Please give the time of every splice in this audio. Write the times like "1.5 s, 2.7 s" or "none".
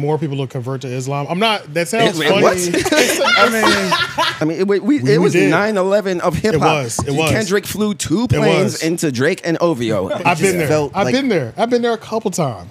4.4 s, 10.1 s